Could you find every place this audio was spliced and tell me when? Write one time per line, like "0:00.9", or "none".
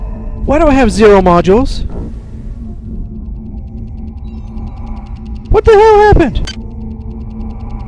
0:06.5